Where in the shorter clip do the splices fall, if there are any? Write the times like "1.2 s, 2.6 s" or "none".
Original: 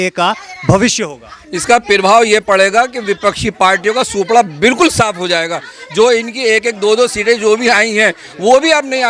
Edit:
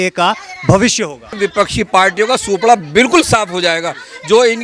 1.4 s